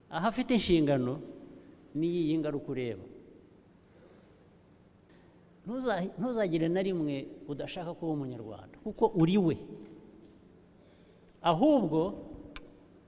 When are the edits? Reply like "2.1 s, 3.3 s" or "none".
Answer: 5.1 s